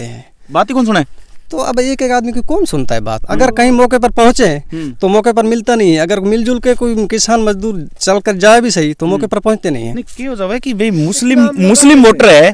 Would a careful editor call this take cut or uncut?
uncut